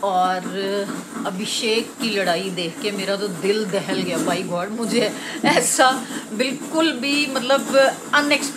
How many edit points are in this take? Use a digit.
0